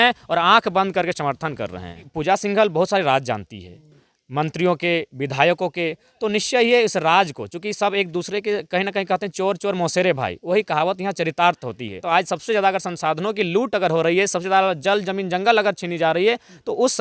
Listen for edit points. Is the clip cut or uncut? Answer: cut